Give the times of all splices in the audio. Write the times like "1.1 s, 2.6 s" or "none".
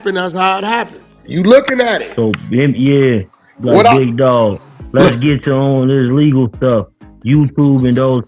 1.1 s